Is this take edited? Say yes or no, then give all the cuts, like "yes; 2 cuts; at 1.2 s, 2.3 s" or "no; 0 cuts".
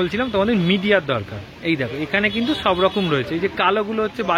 no; 0 cuts